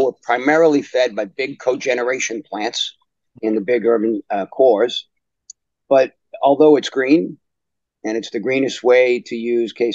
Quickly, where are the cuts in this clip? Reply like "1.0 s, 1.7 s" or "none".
none